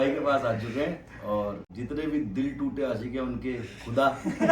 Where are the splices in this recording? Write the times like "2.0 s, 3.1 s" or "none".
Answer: 1.7 s